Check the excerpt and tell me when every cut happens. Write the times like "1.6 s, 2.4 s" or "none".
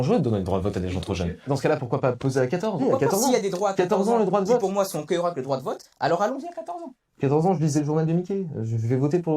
1.4 s, 2.8 s